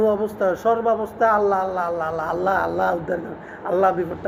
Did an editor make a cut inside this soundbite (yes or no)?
no